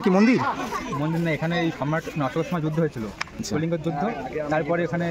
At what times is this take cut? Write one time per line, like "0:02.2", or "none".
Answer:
none